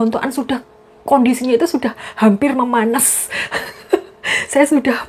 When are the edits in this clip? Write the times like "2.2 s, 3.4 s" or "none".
none